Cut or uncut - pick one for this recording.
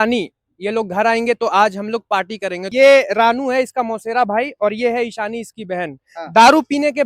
cut